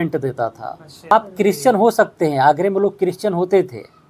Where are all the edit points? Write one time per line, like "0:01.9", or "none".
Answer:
0:01.1